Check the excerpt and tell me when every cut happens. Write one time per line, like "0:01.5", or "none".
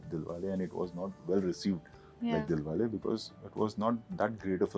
none

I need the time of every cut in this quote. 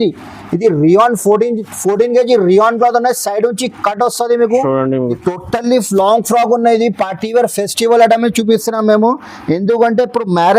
0:05.1

